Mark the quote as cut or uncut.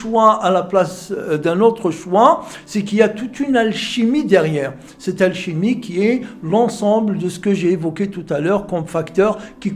uncut